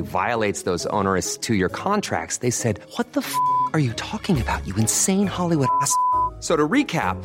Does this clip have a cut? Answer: no; 0 cuts

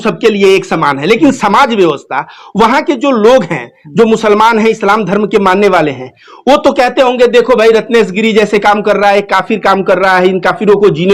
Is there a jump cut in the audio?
no; 0 cuts

